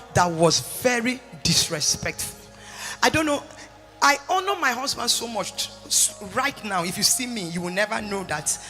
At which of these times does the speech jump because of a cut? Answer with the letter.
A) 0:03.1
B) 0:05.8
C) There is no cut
C